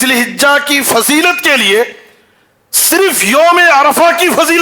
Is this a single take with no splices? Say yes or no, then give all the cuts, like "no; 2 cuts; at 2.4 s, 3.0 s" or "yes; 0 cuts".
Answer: yes; 0 cuts